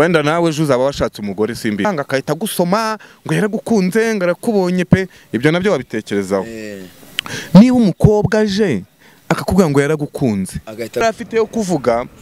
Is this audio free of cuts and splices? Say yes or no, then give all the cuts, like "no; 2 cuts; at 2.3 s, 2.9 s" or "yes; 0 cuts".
no; 2 cuts; at 1.9 s, 11.0 s